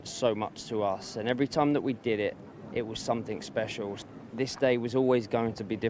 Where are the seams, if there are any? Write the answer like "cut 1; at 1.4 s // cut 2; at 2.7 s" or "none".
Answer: cut 1; at 4.0 s